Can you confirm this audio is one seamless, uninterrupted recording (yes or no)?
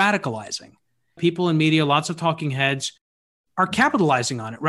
no